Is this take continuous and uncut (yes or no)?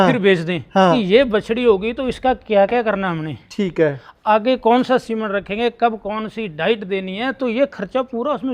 no